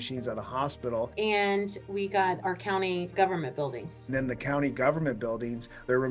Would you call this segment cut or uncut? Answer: cut